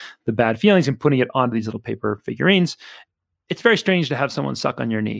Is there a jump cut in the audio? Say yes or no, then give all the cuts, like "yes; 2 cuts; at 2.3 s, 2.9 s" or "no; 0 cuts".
yes; 1 cut; at 3.3 s